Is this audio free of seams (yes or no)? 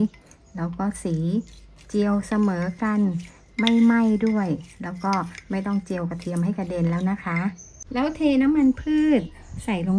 no